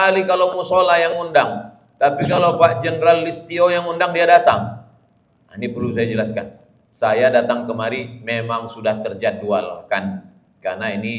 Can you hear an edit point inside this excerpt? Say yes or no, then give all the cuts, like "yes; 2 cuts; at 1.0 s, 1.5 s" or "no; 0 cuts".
no; 0 cuts